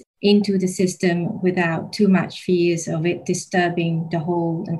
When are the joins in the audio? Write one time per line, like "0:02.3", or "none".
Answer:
none